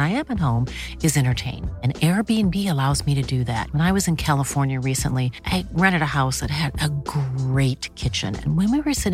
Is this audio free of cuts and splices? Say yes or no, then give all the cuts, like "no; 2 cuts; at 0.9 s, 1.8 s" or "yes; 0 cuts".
yes; 0 cuts